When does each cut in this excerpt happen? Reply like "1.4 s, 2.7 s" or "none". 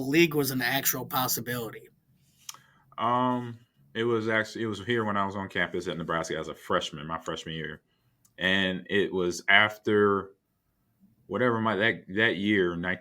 none